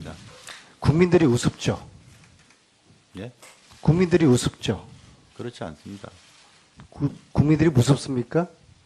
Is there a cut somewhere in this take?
yes; 1 cut; at 5.9 s

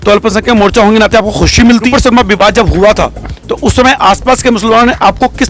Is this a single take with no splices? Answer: no; 1 cut; at 1.9 s

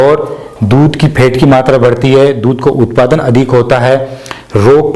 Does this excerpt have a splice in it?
no; 0 cuts

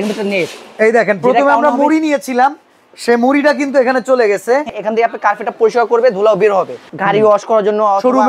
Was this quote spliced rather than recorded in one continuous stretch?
yes; 2 cuts; at 4.8 s, 6.8 s

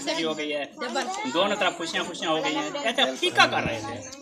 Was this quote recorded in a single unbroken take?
yes; 0 cuts

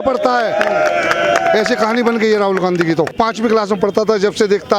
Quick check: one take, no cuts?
no; 1 cut; at 3.1 s

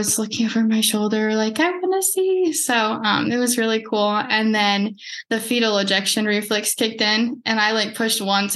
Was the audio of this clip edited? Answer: no; 0 cuts

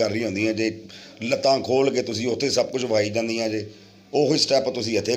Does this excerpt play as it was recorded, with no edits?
yes; 0 cuts

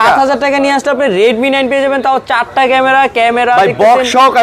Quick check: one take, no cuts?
yes; 0 cuts

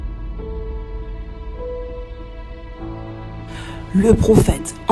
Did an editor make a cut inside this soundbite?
yes; 1 cut; at 3.9 s

